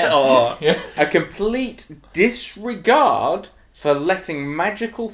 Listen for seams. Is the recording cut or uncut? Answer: cut